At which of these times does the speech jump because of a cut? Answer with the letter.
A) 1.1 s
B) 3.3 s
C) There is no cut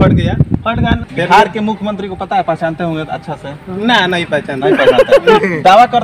A